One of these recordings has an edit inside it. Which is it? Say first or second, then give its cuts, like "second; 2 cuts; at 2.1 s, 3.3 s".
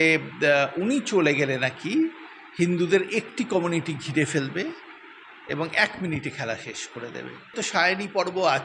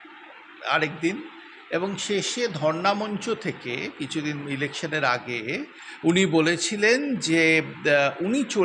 first; 1 cut; at 7.6 s